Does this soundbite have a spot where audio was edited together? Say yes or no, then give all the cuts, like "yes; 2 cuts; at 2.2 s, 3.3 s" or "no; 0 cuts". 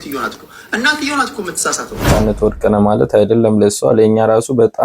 yes; 1 cut; at 2.1 s